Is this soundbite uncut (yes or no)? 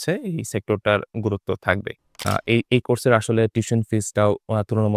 no